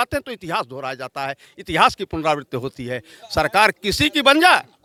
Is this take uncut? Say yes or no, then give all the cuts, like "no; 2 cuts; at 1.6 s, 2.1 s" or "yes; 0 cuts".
yes; 0 cuts